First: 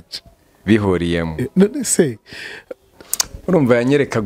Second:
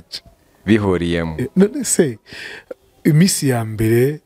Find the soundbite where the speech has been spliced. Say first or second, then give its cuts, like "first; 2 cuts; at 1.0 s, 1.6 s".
first; 1 cut; at 2.9 s